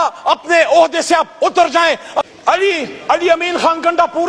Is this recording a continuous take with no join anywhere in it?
no; 1 cut; at 2.1 s

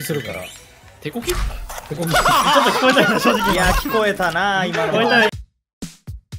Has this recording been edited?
yes; 1 cut; at 5.3 s

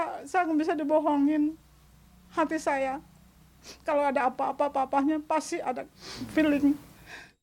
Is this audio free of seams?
yes; 0 cuts

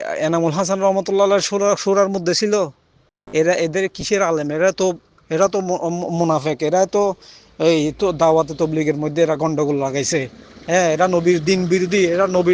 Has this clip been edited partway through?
no; 0 cuts

